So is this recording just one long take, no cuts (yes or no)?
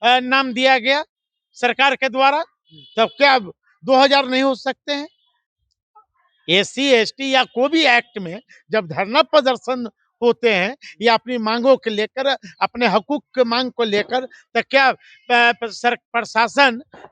yes